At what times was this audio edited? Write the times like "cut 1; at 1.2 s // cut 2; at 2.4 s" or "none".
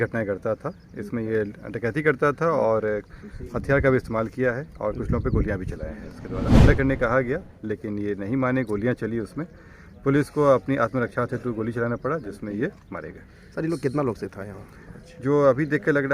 cut 1; at 6.5 s